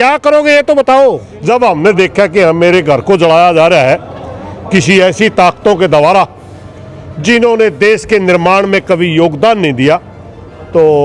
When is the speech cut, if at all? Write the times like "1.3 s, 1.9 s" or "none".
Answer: 1.3 s